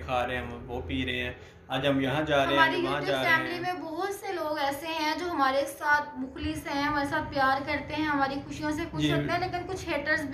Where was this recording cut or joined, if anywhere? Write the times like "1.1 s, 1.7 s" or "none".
none